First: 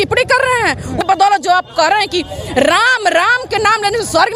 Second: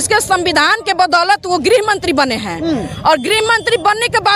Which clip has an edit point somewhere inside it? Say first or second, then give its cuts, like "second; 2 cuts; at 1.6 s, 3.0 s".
first; 1 cut; at 1.0 s